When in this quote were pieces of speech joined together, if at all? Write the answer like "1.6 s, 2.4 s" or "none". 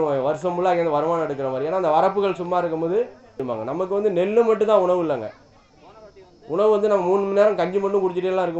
3.5 s